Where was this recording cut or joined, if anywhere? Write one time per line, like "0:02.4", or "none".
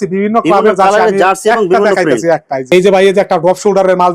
0:02.6